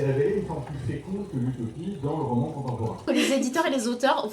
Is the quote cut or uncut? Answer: cut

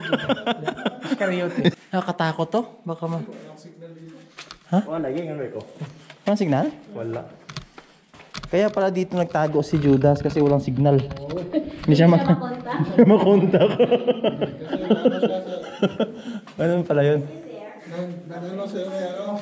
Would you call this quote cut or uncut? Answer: cut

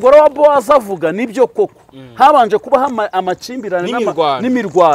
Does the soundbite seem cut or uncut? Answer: uncut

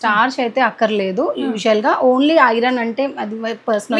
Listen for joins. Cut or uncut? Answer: uncut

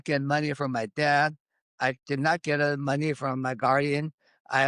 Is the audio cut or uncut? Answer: uncut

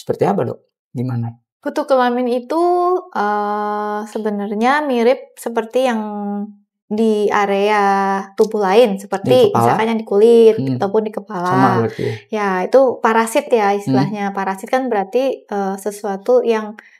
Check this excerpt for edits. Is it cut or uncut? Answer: uncut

